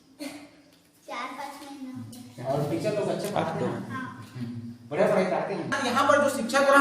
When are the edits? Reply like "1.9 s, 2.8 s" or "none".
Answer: 5.8 s